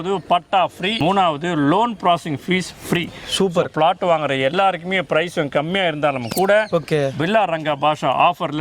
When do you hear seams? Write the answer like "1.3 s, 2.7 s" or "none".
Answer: 0.9 s